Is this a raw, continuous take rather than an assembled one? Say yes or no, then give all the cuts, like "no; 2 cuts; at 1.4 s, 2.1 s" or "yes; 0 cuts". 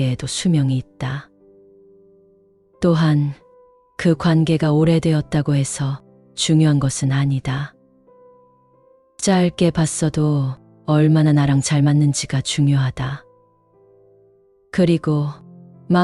no; 2 cuts; at 13.2 s, 14.7 s